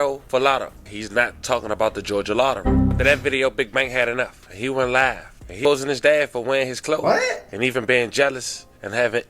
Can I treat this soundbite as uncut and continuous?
no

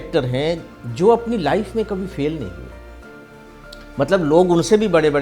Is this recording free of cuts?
yes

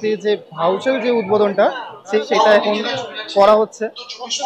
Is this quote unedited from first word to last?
yes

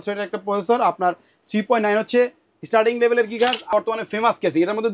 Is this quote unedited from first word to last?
no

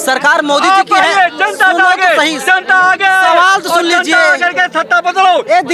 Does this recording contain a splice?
no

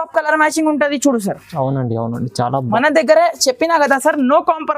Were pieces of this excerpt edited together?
yes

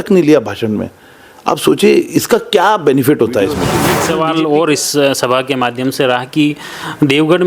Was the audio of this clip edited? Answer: yes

